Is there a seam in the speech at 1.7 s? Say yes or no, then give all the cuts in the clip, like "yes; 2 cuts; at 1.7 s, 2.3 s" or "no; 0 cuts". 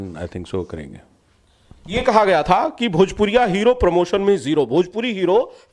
no; 0 cuts